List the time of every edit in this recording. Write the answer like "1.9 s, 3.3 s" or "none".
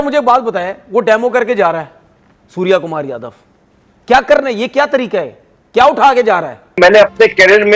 6.8 s